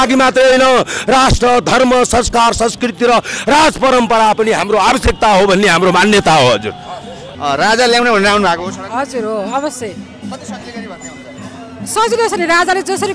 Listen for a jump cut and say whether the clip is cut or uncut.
uncut